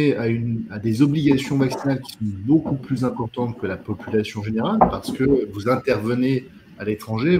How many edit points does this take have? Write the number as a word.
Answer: zero